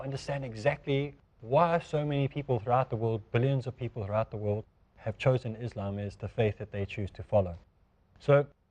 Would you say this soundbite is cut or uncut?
uncut